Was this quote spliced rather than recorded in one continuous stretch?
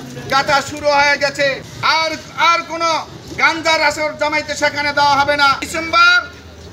yes; 2 cuts; at 1.7 s, 5.6 s

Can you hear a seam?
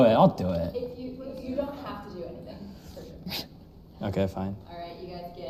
no; 0 cuts

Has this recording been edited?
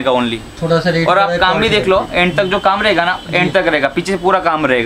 no; 0 cuts

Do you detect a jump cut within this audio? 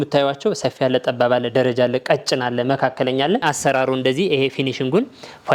yes; 1 cut; at 3.4 s

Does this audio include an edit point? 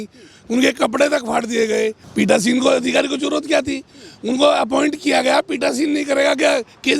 yes; 1 cut; at 2.0 s

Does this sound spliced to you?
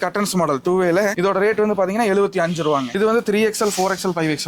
yes; 2 cuts; at 1.1 s, 2.9 s

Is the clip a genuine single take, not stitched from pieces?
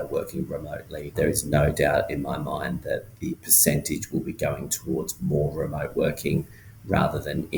yes; 0 cuts

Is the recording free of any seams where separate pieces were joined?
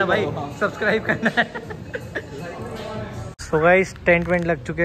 no; 1 cut; at 3.3 s

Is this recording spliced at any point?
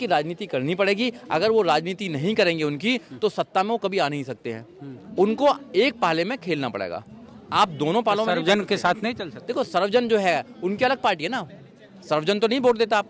no; 0 cuts

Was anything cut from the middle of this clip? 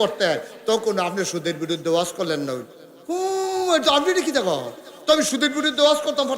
no; 0 cuts

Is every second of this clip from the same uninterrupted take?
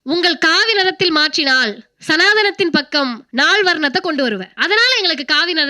no; 2 cuts; at 3.2 s, 4.5 s

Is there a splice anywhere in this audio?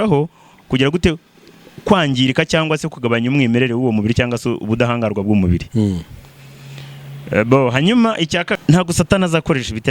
yes; 1 cut; at 8.6 s

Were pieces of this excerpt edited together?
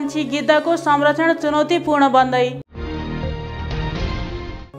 no; 0 cuts

